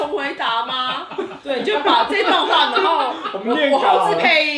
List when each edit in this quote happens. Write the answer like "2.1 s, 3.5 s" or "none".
1.4 s